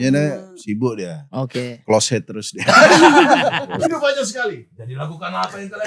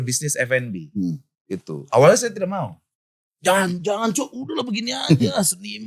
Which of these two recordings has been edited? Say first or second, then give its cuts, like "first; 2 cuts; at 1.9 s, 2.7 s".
first; 1 cut; at 3.7 s